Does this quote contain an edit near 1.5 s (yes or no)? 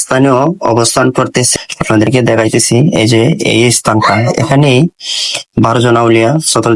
yes